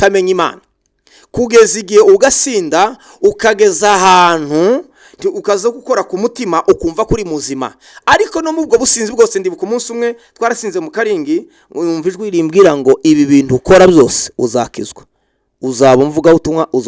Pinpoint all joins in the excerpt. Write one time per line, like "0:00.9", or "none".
none